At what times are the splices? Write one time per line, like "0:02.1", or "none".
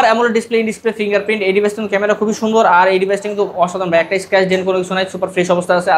none

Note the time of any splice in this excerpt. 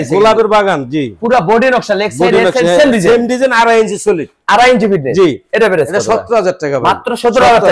none

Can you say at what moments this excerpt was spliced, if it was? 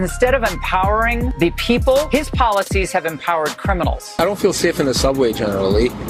0:01.3
0:02.1
0:04.2

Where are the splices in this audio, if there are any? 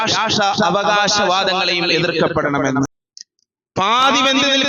0:03.0

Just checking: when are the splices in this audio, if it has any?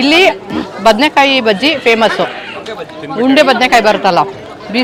none

